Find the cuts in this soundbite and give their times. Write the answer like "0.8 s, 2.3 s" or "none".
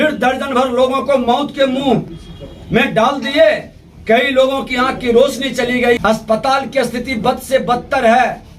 6.0 s